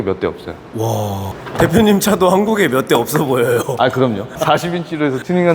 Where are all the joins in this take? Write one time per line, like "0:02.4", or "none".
0:01.3